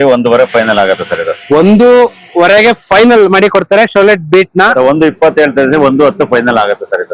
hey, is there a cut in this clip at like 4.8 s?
yes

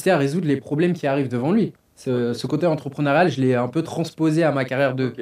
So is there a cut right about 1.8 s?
yes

